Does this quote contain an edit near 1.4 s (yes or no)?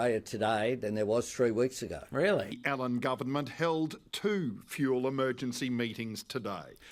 no